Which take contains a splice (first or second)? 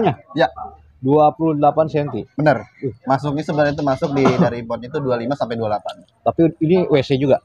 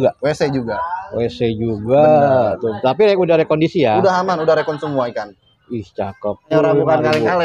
second